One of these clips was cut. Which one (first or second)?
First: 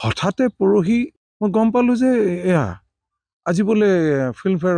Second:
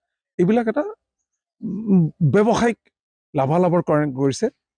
first